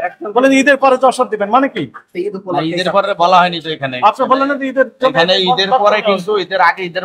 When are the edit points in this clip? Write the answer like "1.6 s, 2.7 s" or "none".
2.0 s